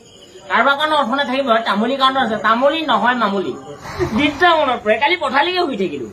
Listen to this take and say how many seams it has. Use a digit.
1